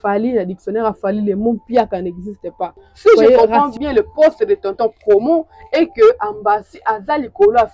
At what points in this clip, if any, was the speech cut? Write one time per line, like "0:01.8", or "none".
0:03.4